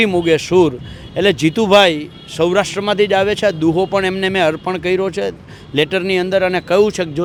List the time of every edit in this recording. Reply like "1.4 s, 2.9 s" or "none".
none